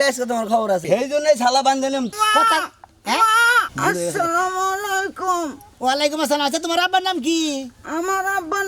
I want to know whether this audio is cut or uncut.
cut